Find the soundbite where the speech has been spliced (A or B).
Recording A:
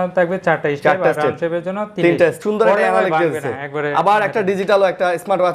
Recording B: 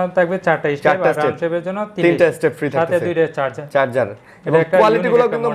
A